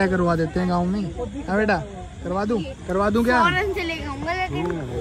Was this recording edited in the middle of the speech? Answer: no; 0 cuts

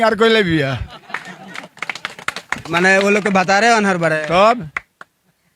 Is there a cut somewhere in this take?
no; 0 cuts

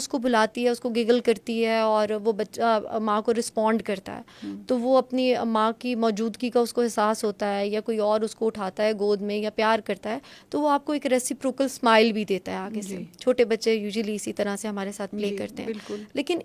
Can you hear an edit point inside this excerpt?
no; 0 cuts

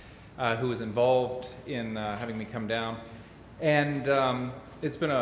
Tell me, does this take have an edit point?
yes; 1 cut; at 4.2 s

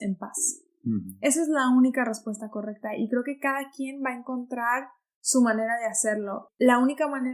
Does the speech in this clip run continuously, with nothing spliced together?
no; 1 cut; at 6.4 s

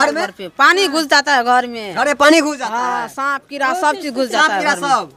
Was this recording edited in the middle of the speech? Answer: no; 0 cuts

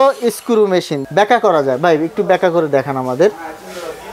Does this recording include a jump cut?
yes; 1 cut; at 1.0 s

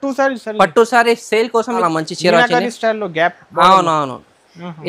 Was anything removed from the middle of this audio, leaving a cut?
yes; 1 cut; at 1.8 s

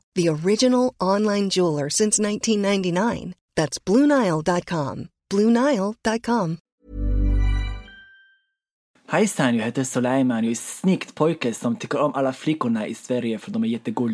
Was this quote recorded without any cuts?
no; 2 cuts; at 6.7 s, 8.9 s

